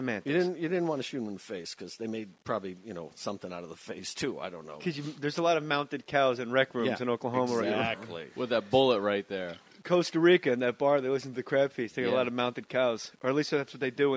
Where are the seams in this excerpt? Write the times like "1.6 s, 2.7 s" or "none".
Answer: none